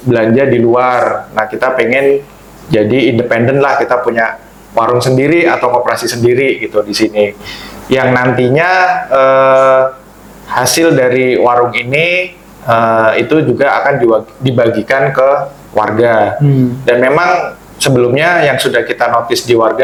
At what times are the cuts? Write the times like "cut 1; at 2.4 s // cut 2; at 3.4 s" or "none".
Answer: none